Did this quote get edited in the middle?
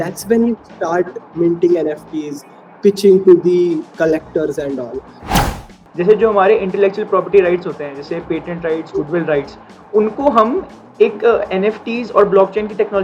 yes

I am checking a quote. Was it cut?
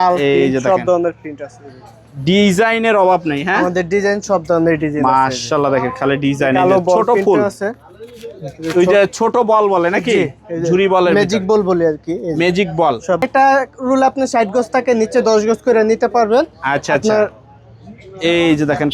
yes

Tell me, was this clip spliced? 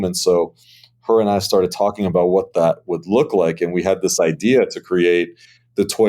no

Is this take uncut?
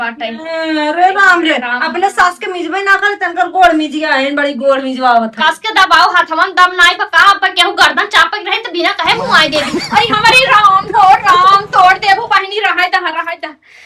yes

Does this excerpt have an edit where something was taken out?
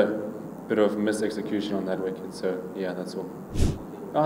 no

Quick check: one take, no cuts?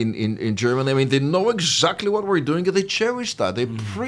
yes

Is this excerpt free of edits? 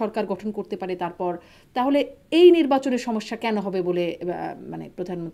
yes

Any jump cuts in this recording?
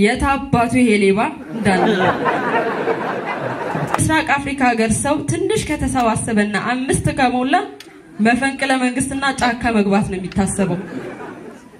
yes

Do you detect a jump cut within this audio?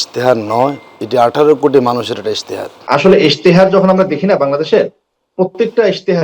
yes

